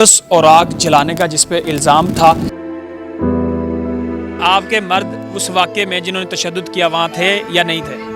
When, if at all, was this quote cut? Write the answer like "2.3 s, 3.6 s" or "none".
2.5 s, 4.4 s

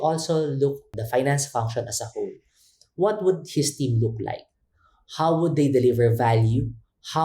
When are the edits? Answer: 0.9 s

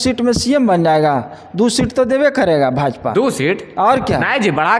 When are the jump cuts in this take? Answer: none

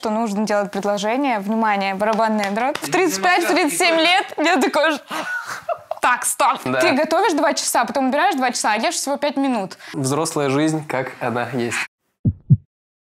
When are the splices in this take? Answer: 2.8 s, 6.6 s, 9.9 s

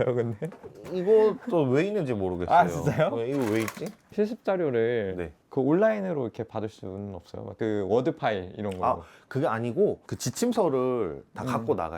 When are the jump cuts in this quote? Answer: 4.1 s

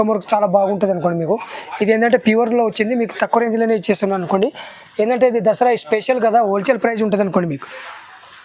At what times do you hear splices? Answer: none

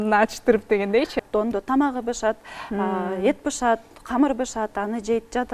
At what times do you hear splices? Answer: 1.3 s

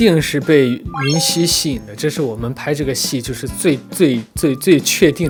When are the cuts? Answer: none

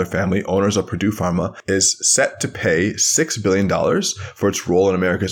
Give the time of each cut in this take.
1.6 s

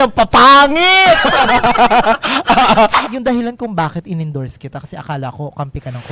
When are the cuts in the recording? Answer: 3.0 s

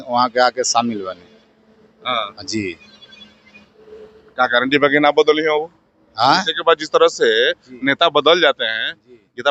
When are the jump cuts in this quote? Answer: none

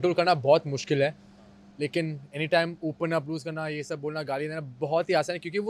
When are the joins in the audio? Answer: none

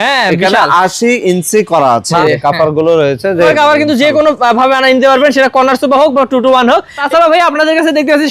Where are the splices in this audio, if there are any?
2.1 s, 3.5 s, 7.0 s

